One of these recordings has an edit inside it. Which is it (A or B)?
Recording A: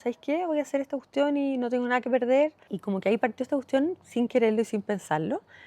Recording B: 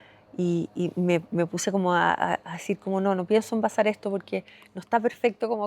A